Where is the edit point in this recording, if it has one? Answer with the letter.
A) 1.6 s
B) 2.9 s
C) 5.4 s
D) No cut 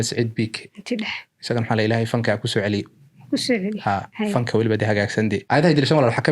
C